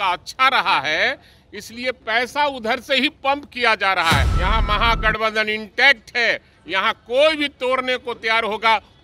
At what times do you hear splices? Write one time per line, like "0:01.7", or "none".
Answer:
0:04.3